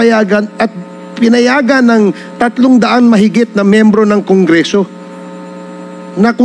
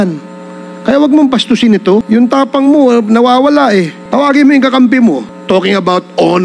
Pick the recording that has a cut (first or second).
second